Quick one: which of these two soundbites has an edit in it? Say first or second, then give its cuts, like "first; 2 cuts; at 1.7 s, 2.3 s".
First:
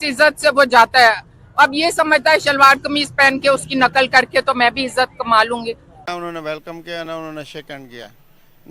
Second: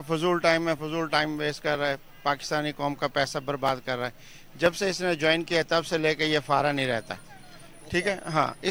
first; 1 cut; at 6.1 s